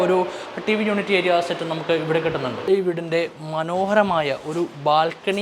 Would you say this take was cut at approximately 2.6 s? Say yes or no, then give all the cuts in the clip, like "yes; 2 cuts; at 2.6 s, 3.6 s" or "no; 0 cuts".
yes; 1 cut; at 2.6 s